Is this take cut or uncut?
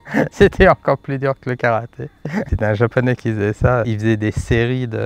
cut